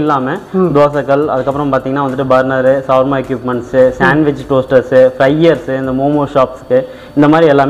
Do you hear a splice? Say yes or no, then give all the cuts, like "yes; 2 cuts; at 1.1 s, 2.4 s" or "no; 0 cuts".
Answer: no; 0 cuts